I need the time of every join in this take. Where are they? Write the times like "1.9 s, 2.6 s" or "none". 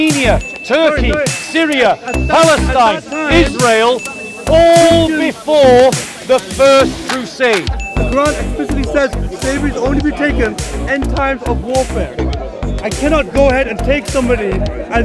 6.1 s, 7.8 s